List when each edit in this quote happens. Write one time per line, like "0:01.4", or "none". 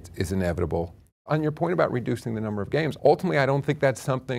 0:01.2
0:02.9